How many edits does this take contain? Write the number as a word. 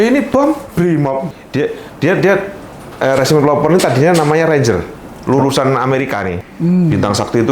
two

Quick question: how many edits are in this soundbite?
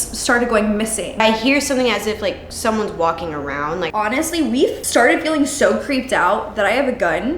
three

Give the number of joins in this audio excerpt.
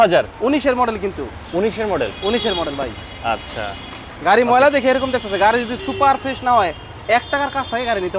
zero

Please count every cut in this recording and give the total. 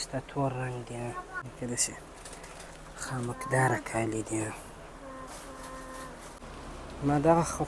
one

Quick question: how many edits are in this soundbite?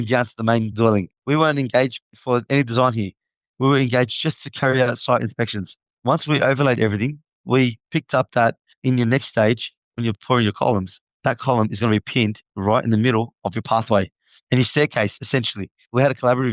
two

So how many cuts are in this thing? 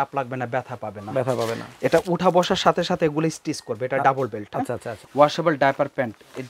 one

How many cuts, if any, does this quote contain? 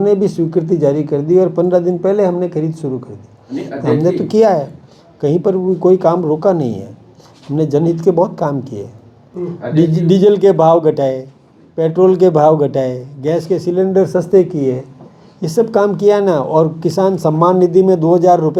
zero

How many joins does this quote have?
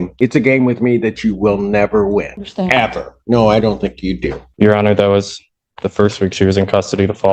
zero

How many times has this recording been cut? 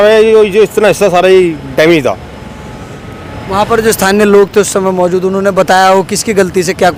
zero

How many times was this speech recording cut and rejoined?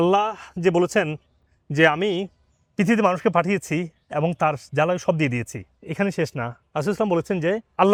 zero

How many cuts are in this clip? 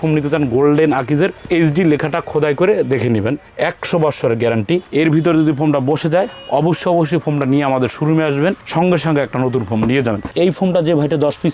zero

